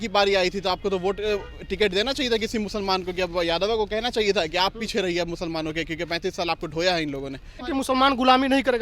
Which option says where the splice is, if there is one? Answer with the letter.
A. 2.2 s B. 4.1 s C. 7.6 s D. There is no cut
C